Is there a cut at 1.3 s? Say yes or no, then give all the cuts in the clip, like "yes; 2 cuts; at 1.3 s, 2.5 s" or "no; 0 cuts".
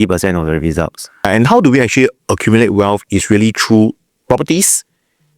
yes; 1 cut; at 1.3 s